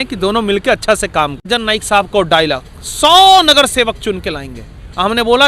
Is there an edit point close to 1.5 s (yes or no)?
yes